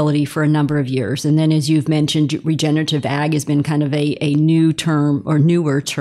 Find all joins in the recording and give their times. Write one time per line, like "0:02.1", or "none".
none